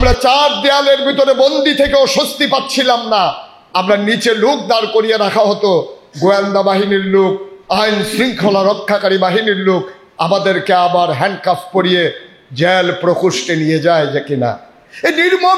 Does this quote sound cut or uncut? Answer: uncut